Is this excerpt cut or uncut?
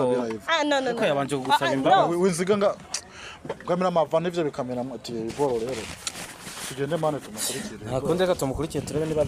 uncut